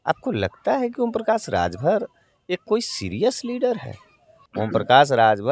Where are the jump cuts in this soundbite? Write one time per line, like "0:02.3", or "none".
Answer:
0:04.5